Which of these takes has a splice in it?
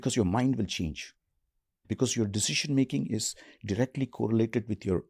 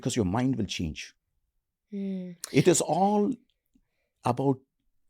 first; 1 cut; at 1.8 s

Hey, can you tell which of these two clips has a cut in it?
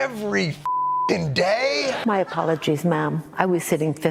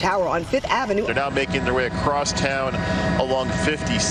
first; 1 cut; at 1.9 s

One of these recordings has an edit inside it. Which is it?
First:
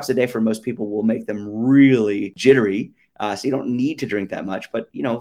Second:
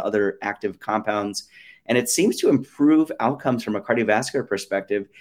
first; 1 cut; at 2.3 s

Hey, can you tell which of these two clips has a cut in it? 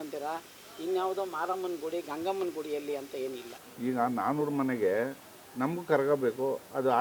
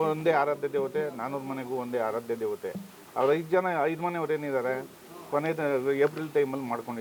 first; 1 cut; at 3.6 s

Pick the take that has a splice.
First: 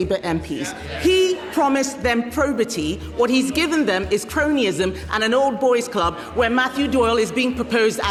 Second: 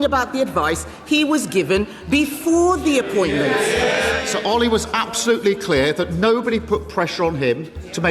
second; 1 cut; at 4.3 s

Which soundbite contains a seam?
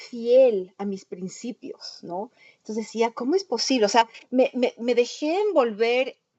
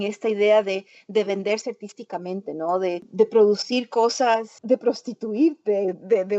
second; 2 cuts; at 3.1 s, 4.5 s

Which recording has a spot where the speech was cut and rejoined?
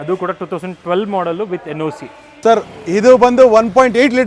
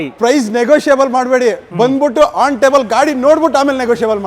first; 1 cut; at 2.2 s

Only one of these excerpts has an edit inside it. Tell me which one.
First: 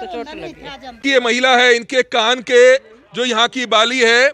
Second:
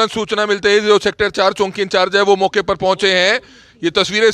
first; 1 cut; at 1.0 s

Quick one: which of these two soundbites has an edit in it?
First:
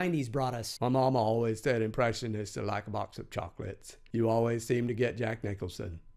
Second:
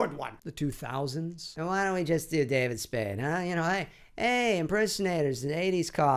first; 1 cut; at 3.1 s

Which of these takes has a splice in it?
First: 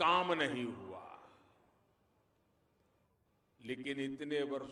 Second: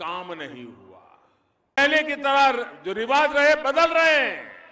second; 1 cut; at 1.8 s

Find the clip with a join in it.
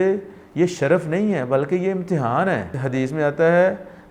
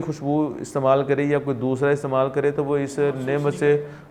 first; 1 cut; at 2.8 s

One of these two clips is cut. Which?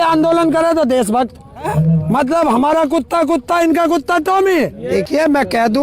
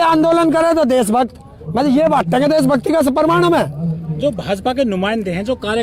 first; 2 cuts; at 1.7 s, 4.8 s

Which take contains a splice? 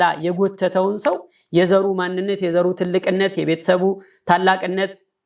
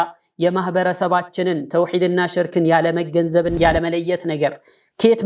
second; 1 cut; at 3.6 s

